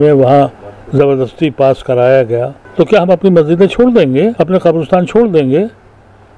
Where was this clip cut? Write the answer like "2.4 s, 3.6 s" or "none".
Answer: 2.6 s, 4.3 s